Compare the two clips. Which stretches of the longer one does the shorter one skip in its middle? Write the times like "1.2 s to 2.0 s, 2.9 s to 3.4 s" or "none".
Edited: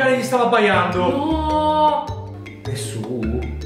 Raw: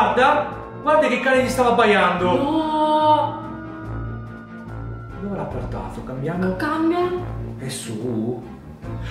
3.7 s to 7.4 s